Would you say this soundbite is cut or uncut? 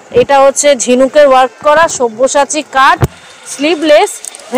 uncut